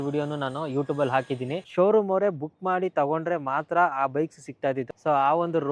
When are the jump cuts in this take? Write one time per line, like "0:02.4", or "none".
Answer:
0:01.6
0:04.8